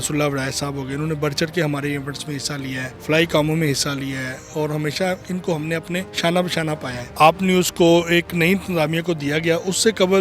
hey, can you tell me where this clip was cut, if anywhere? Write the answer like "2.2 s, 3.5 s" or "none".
2.9 s, 6.1 s, 7.1 s